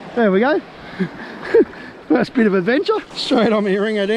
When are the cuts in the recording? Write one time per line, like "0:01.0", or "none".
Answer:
0:03.1